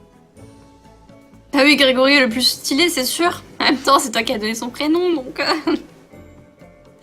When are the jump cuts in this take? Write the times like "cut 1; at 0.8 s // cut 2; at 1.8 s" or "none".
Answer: cut 1; at 4.9 s